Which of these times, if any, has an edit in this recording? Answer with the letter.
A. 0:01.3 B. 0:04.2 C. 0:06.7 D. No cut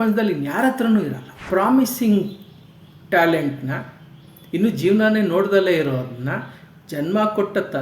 A